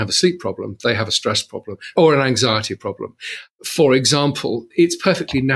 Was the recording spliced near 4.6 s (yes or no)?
yes